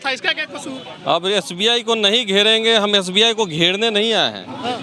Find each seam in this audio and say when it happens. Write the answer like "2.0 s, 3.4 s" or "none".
none